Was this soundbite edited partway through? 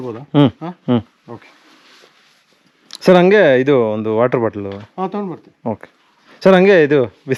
no; 0 cuts

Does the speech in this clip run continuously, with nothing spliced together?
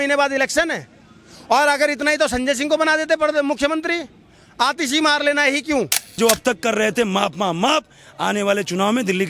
no; 1 cut; at 6.0 s

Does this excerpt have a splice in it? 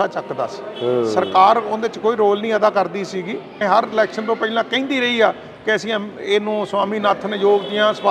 yes; 1 cut; at 3.6 s

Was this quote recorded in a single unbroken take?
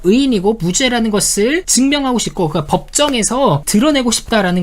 no; 1 cut; at 3.6 s

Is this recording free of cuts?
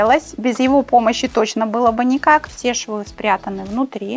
no; 1 cut; at 2.5 s

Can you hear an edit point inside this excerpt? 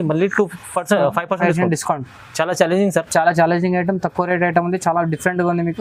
no; 0 cuts

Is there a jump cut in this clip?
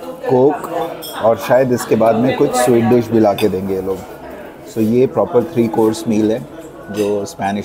no; 0 cuts

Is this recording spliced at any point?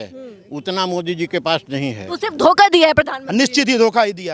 yes; 1 cut; at 2.1 s

